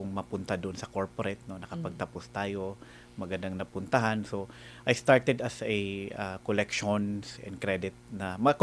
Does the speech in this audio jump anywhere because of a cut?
no; 0 cuts

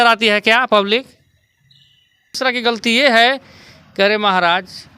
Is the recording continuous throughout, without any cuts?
no; 1 cut; at 2.4 s

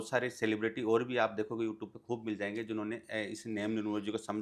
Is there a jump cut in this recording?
no; 0 cuts

